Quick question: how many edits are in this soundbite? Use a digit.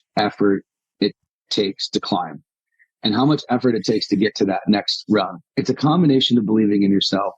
1